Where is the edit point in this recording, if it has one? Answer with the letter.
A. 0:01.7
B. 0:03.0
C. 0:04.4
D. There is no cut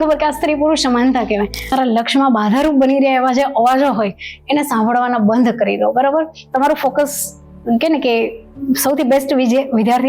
A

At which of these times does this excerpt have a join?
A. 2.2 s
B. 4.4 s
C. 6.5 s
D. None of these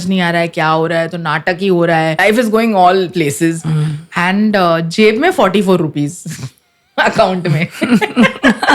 A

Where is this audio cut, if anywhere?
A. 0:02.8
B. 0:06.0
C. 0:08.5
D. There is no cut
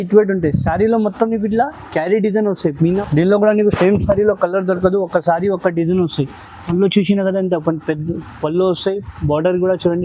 A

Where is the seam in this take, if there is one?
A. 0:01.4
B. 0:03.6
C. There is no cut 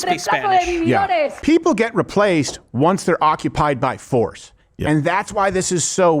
A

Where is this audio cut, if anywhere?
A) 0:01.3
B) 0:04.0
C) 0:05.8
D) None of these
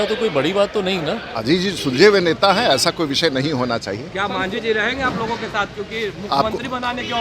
A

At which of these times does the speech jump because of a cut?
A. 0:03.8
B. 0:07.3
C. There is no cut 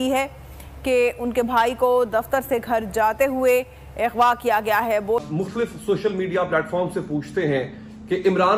C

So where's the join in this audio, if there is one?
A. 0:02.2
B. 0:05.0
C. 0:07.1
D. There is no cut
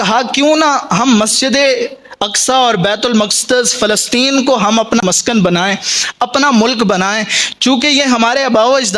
B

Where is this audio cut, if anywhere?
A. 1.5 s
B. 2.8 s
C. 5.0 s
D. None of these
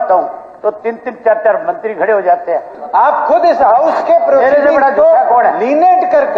B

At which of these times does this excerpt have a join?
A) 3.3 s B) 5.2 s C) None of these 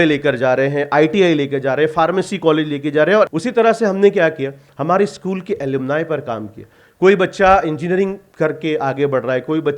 A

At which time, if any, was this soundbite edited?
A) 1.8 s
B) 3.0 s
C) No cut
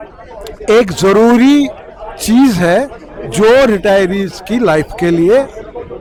C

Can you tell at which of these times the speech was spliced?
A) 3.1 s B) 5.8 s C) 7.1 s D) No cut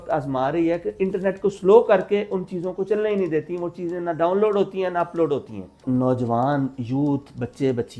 B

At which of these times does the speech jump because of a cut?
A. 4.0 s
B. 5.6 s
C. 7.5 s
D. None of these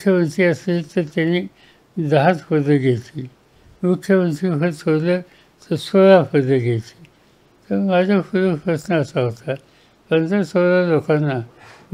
D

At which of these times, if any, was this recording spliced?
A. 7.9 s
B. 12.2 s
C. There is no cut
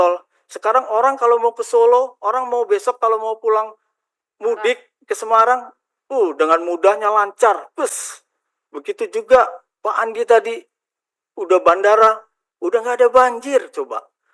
C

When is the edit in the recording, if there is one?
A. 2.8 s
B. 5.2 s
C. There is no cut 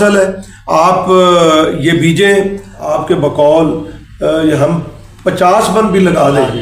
A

